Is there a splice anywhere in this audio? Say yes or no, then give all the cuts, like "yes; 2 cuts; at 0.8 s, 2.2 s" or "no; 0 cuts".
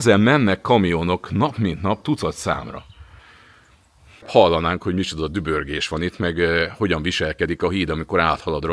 no; 0 cuts